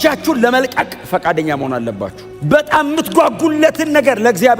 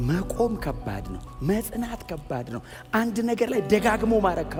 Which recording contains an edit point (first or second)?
first